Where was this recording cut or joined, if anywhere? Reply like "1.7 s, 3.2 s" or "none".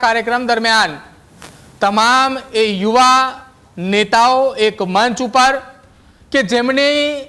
none